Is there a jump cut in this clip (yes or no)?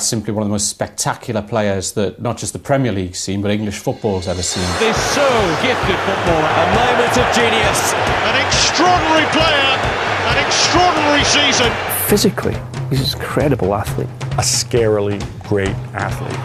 no